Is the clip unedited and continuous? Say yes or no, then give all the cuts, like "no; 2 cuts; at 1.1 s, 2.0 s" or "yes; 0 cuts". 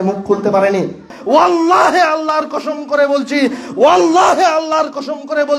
no; 1 cut; at 1.1 s